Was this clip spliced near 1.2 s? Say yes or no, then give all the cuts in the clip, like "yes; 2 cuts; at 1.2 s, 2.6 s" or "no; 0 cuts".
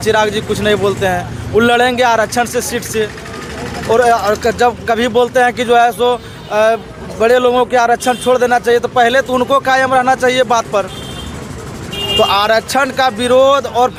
no; 0 cuts